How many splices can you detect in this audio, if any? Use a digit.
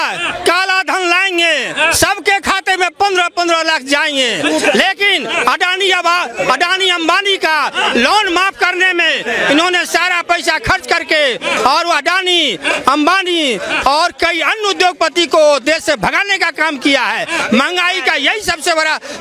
0